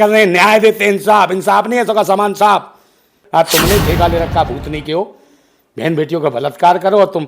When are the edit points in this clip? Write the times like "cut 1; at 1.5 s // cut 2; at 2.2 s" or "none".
cut 1; at 3.2 s